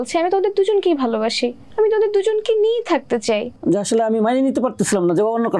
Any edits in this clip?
yes; 2 cuts; at 1.6 s, 3.6 s

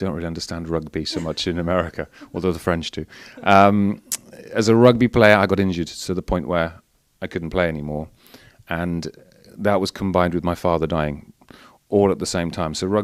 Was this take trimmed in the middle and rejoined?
no; 0 cuts

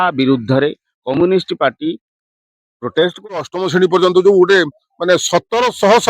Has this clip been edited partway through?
yes; 1 cut; at 3.2 s

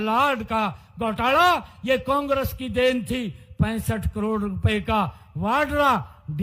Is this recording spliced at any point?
no; 0 cuts

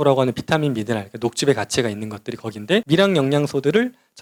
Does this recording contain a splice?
no; 0 cuts

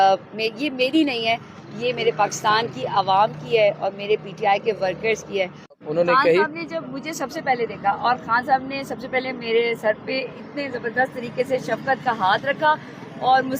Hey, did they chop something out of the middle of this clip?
yes; 1 cut; at 5.7 s

